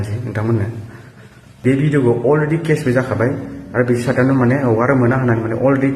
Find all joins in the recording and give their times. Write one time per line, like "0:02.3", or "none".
0:01.6